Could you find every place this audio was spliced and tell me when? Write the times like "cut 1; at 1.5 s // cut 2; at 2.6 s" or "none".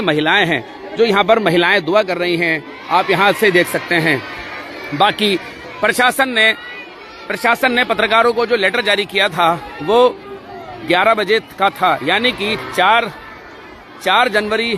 none